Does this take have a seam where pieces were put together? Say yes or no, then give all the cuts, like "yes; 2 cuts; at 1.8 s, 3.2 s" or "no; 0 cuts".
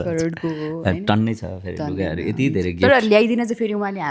no; 0 cuts